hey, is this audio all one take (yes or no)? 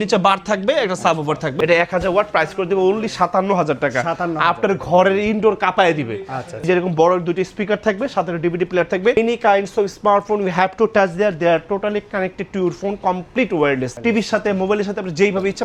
no